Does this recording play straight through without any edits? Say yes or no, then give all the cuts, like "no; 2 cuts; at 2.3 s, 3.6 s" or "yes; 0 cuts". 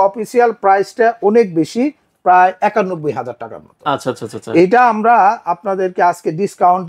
yes; 0 cuts